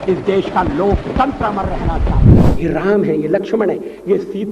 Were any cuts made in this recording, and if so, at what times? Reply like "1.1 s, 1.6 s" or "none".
2.3 s